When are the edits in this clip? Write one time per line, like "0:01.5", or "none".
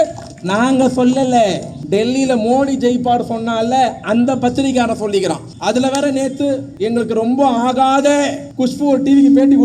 0:01.7
0:05.5
0:06.7
0:08.4